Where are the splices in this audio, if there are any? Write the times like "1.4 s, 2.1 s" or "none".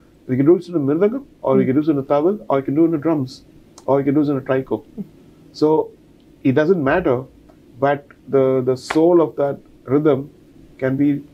none